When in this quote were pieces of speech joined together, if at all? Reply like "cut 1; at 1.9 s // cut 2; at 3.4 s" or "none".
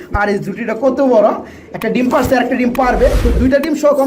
none